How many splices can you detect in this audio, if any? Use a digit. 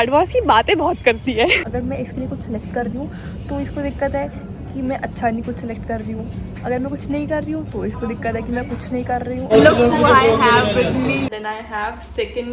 3